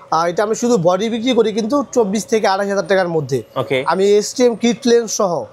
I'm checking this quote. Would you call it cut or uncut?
uncut